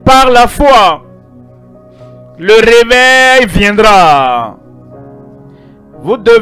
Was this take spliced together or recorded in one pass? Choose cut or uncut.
cut